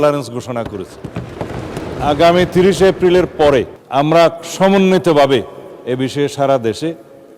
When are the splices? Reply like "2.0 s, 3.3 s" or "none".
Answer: 1.8 s, 3.8 s

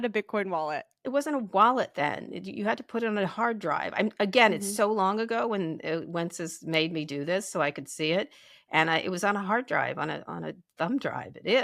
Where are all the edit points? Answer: 1.1 s

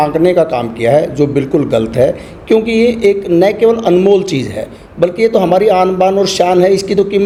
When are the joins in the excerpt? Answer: none

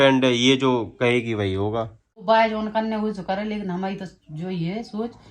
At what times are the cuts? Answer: 2.2 s

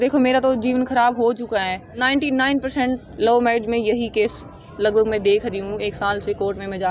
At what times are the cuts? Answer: 1.9 s

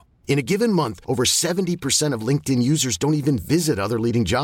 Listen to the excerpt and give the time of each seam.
none

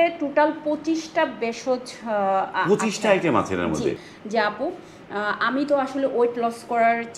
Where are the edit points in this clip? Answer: 4.0 s

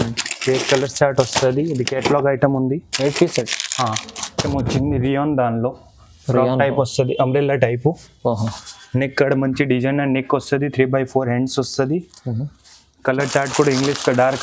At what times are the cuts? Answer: 4.4 s

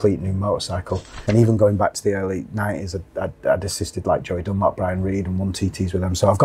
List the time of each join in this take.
1.2 s

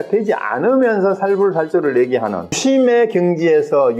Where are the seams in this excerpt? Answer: 2.6 s

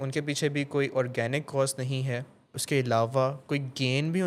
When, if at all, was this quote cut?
2.5 s

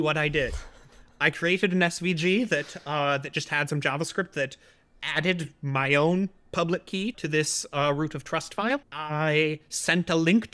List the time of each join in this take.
7.2 s, 9.0 s

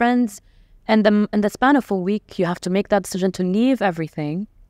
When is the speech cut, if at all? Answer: none

